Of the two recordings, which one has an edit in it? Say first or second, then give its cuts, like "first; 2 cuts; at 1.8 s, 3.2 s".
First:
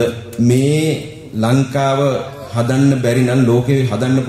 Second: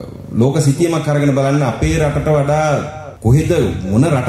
second; 1 cut; at 3.0 s